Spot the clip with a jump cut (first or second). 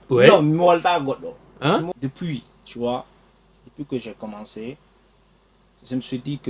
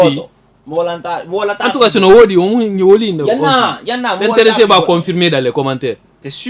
first